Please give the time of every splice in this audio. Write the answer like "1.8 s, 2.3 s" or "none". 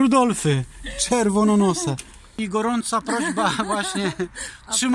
2.2 s